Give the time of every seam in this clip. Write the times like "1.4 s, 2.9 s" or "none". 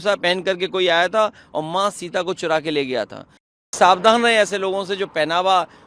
3.7 s